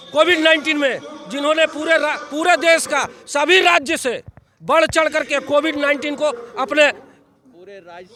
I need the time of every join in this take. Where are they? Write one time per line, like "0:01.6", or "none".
none